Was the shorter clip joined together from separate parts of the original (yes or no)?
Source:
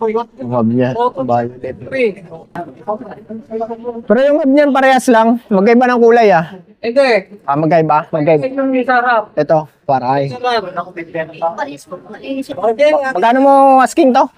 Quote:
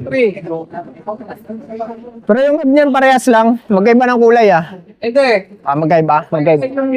no